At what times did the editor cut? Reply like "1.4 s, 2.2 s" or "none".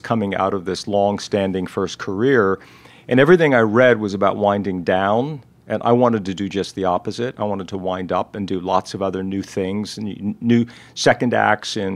none